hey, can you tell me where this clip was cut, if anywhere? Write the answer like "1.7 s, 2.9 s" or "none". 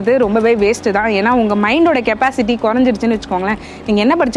none